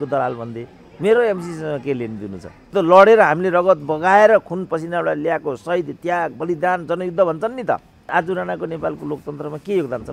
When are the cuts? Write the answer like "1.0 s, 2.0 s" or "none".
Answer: 2.7 s, 8.0 s